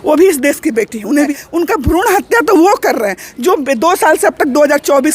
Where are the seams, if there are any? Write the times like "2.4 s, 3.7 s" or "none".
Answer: 1.3 s